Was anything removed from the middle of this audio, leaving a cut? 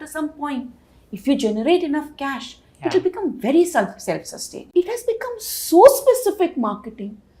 yes; 1 cut; at 4.6 s

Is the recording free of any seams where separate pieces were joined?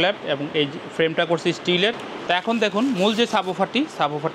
no; 1 cut; at 2.1 s

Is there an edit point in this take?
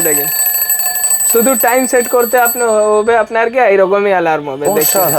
no; 0 cuts

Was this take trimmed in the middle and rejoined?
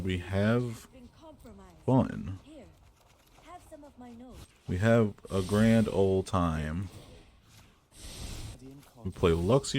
yes; 2 cuts; at 4.4 s, 8.5 s

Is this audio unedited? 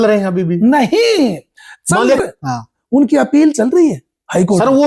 no; 1 cut; at 2.2 s

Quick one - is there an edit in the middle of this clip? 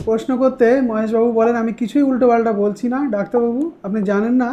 no; 0 cuts

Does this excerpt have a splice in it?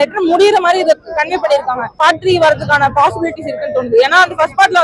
yes; 1 cut; at 2.0 s

